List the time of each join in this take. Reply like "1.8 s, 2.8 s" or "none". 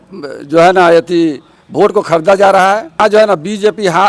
3.0 s